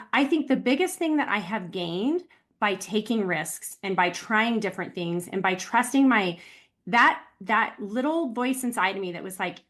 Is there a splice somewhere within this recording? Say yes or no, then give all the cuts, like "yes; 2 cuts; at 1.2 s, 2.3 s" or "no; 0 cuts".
no; 0 cuts